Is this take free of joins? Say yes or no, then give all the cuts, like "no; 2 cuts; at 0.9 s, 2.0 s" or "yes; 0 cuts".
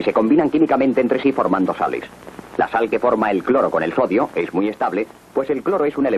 yes; 0 cuts